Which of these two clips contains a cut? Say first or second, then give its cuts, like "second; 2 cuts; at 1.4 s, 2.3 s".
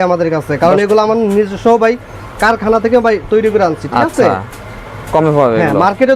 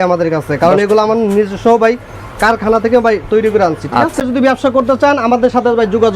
second; 1 cut; at 4.2 s